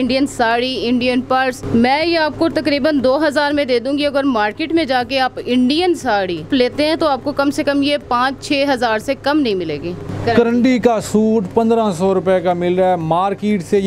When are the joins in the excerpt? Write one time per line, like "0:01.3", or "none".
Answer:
0:01.6
0:06.5
0:10.1